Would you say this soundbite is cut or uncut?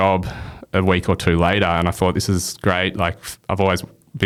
uncut